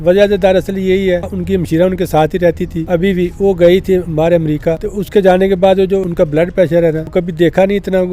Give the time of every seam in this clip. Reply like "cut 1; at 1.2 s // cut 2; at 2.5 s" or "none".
cut 1; at 1.3 s // cut 2; at 2.7 s // cut 3; at 4.9 s // cut 4; at 6.1 s // cut 5; at 7.0 s